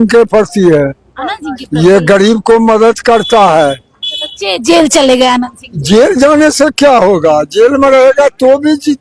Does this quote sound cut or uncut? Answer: uncut